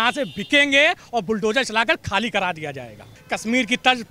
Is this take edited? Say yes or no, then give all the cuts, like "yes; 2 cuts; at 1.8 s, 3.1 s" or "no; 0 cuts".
yes; 1 cut; at 3.2 s